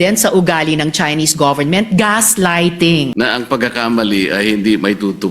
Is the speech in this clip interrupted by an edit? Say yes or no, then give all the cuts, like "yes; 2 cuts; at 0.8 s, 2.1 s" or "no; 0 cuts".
yes; 1 cut; at 3.1 s